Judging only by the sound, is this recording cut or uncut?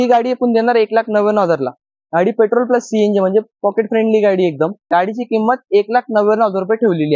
cut